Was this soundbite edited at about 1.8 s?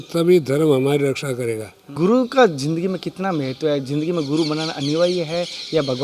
yes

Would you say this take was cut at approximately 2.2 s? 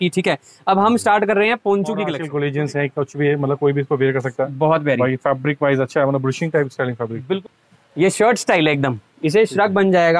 yes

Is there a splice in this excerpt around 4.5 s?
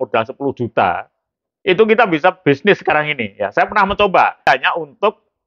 yes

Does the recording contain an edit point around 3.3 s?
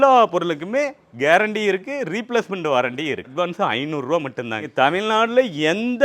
yes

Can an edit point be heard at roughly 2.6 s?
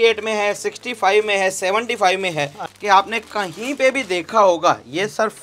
yes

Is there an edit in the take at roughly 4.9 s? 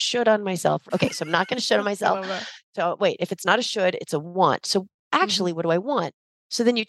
no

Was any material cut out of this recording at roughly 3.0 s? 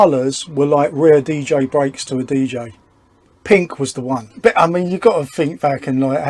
no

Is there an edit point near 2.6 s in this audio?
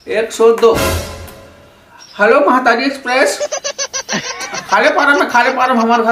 no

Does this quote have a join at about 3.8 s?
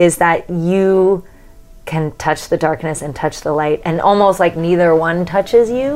yes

